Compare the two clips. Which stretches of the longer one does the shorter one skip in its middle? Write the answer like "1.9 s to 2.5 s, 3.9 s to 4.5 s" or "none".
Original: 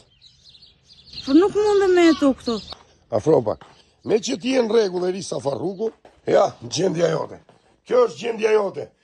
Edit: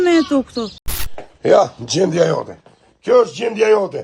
3.1 s to 6.0 s